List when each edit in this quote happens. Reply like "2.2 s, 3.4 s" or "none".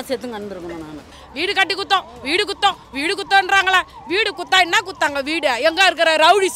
1.1 s